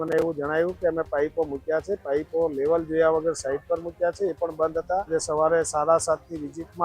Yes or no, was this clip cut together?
yes